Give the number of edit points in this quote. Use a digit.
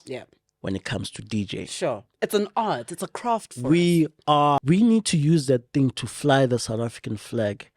1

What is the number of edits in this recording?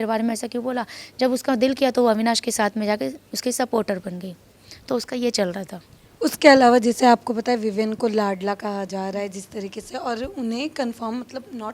0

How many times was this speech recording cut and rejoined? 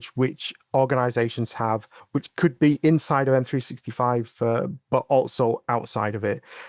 1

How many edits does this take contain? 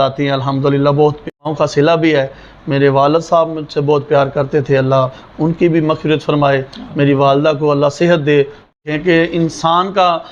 2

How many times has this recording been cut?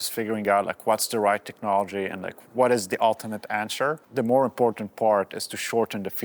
2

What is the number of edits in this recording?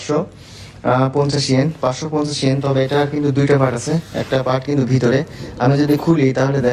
0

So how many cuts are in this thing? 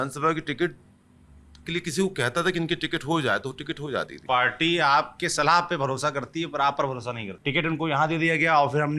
2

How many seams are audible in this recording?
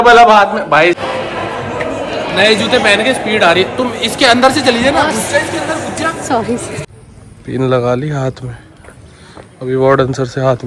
2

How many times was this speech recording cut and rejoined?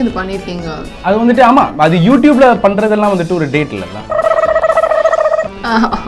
1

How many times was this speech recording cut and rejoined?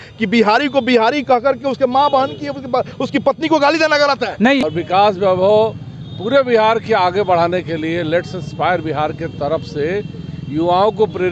1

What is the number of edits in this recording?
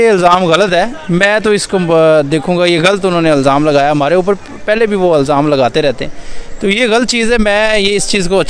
0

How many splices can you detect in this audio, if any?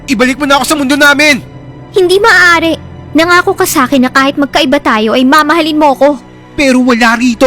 1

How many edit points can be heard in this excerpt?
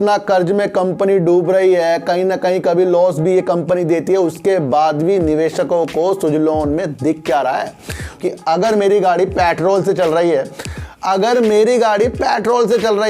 1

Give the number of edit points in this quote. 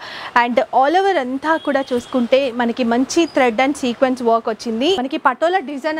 1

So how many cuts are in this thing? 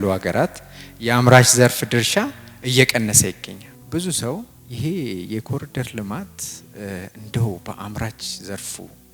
2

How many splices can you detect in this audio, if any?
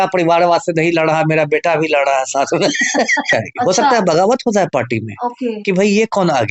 1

